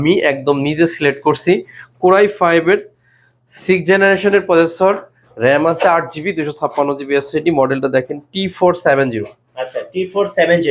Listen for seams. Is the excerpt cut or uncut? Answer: uncut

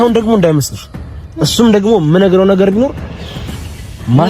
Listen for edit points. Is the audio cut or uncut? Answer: uncut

